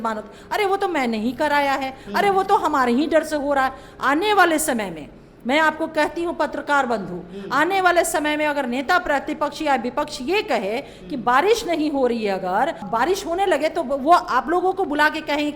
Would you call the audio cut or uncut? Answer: cut